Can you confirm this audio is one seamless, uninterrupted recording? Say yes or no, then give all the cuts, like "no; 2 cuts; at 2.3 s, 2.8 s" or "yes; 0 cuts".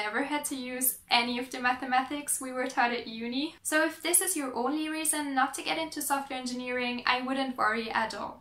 yes; 0 cuts